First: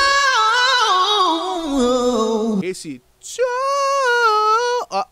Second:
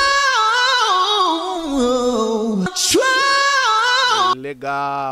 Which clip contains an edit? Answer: first; 1 cut; at 2.6 s

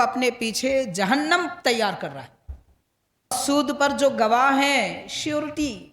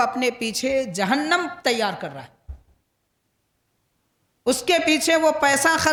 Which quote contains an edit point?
first; 1 cut; at 3.4 s

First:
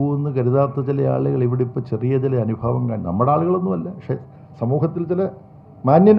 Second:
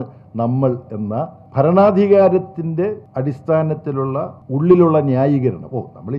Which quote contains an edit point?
second; 3 cuts; at 1.4 s, 3.0 s, 4.4 s

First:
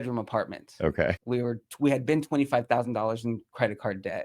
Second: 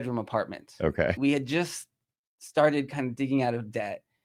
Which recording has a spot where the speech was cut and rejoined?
first; 1 cut; at 1.2 s

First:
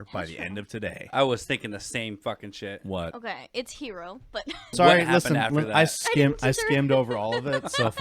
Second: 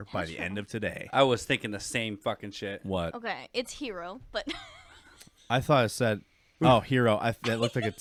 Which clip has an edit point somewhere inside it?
first; 1 cut; at 4.7 s

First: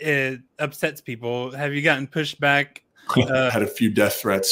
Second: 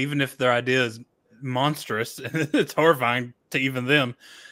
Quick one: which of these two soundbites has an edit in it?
first; 1 cut; at 3.5 s

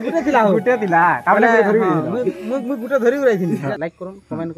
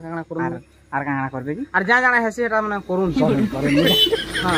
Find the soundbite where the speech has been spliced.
first; 1 cut; at 3.7 s

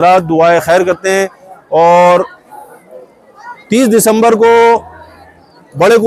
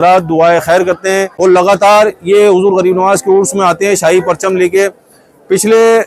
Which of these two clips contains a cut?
second; 1 cut; at 1.3 s

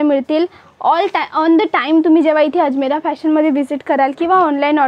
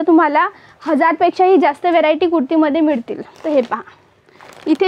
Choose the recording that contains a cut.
second; 1 cut; at 3.3 s

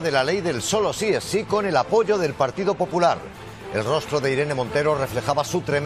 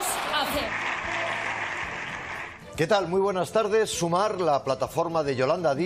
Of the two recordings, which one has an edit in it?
second; 1 cut; at 4.8 s

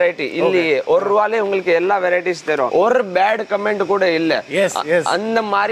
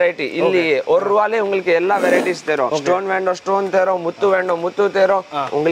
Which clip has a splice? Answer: first; 1 cut; at 2.7 s

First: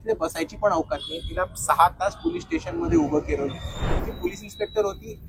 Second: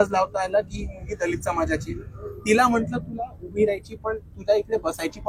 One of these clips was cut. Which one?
first; 1 cut; at 4.0 s

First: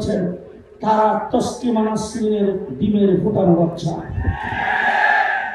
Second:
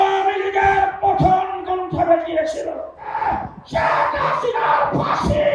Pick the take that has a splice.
second; 1 cut; at 3.1 s

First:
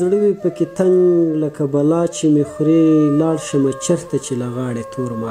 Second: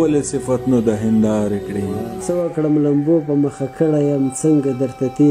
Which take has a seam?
second; 1 cut; at 2.1 s

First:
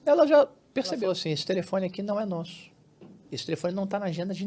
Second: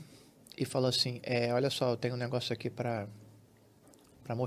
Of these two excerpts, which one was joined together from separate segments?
first; 1 cut; at 1.0 s

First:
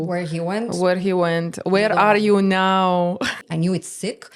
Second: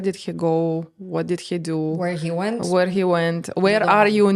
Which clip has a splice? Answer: first; 1 cut; at 3.4 s

